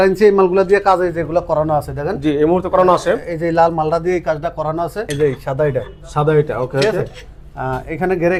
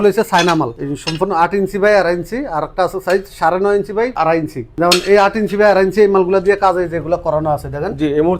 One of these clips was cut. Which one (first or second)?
second